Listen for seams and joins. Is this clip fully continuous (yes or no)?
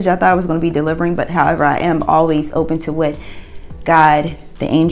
yes